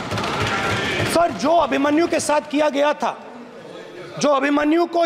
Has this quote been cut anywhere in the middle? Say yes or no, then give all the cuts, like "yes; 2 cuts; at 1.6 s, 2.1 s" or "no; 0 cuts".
no; 0 cuts